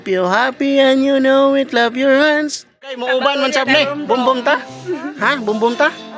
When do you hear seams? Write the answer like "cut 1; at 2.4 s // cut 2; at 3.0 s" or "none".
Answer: cut 1; at 3.0 s